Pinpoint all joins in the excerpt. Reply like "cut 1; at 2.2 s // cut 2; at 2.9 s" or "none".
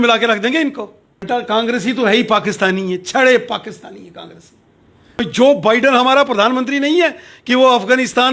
cut 1; at 1.2 s // cut 2; at 5.2 s